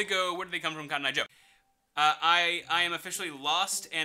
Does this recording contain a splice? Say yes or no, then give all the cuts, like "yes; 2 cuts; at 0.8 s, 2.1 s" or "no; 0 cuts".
yes; 1 cut; at 1.4 s